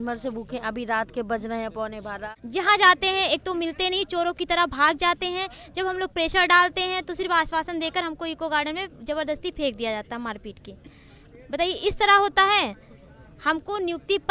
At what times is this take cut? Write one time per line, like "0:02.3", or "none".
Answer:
0:02.3